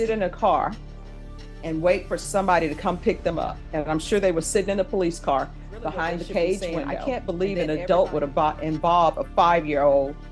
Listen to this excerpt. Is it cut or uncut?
cut